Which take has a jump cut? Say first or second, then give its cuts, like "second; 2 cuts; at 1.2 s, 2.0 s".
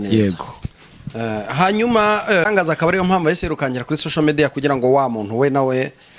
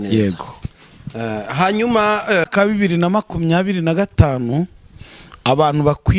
second; 1 cut; at 2.5 s